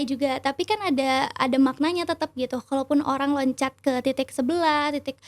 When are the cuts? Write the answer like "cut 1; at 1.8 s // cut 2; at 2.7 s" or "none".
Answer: none